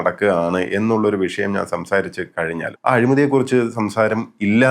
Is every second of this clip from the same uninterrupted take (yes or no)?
no